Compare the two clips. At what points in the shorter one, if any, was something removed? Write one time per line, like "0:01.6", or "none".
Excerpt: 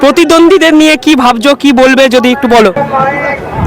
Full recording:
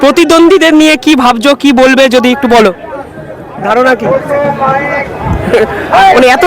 0:02.8